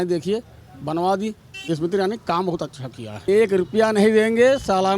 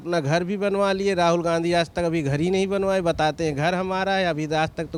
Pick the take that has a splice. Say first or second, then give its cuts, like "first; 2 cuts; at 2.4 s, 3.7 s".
first; 2 cuts; at 1.6 s, 3.1 s